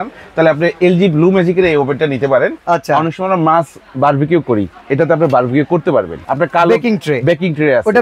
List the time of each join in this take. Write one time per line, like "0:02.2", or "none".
0:02.6
0:06.2